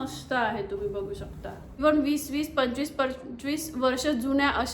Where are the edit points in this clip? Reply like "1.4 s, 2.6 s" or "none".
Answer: 1.8 s